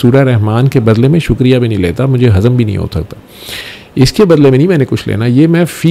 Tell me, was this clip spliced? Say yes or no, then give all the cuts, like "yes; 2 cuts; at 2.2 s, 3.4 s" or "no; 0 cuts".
no; 0 cuts